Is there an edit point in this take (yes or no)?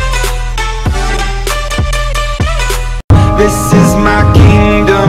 yes